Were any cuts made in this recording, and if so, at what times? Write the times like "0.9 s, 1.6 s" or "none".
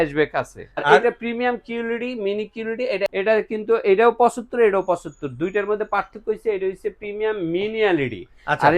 0.8 s, 3.1 s